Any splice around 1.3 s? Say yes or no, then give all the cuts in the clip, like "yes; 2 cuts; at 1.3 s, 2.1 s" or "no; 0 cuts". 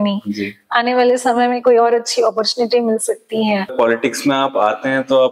no; 1 cut; at 3.7 s